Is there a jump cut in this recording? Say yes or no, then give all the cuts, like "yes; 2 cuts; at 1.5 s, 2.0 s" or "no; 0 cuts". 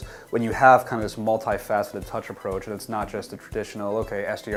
no; 0 cuts